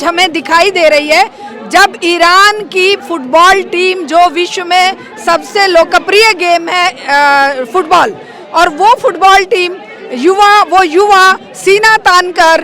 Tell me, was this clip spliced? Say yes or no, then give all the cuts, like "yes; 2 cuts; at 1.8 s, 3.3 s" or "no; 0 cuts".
no; 0 cuts